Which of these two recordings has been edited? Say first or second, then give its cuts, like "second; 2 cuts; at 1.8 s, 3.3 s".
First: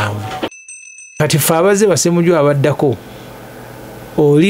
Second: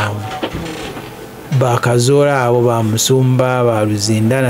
first; 1 cut; at 1.1 s